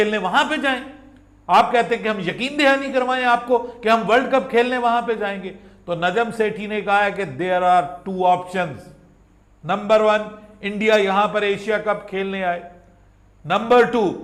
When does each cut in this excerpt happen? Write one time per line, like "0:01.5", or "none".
none